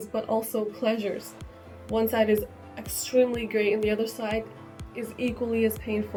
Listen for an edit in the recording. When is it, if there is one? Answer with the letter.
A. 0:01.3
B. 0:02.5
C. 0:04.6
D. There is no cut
D